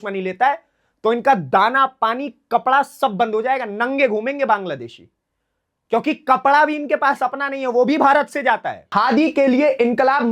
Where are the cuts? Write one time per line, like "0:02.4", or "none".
0:08.9